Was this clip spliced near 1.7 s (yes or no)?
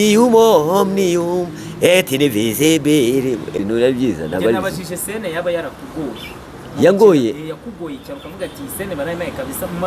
no